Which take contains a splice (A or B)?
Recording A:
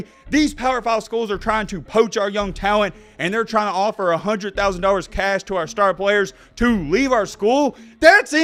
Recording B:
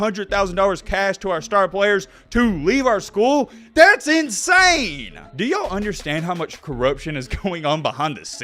B